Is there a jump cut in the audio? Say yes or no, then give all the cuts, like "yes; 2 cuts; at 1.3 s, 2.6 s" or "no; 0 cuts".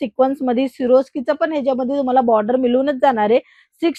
no; 0 cuts